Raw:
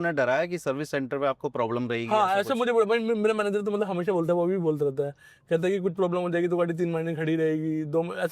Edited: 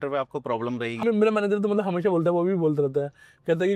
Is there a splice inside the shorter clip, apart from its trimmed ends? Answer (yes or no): yes